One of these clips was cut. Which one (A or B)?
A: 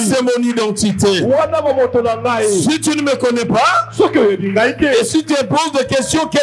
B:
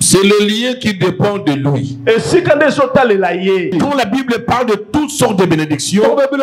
B